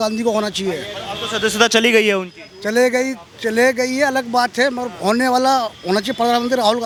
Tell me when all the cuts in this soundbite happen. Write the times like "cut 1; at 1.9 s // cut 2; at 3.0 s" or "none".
none